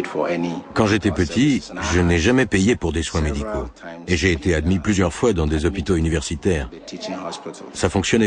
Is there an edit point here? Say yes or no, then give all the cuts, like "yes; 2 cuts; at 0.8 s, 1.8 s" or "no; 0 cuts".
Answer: no; 0 cuts